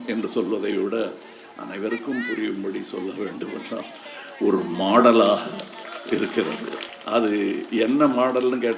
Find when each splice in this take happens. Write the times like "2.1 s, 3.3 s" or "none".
6.9 s